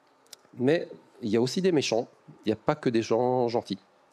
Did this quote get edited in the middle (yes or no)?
no